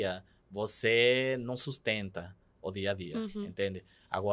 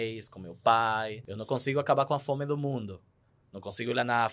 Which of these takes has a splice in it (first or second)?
second